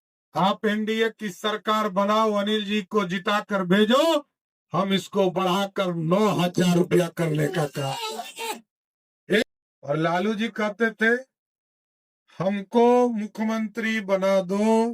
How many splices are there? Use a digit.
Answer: 1